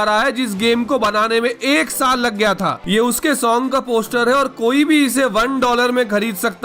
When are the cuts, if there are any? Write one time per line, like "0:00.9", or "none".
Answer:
0:02.8